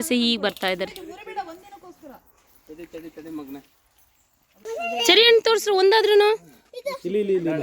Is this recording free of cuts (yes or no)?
yes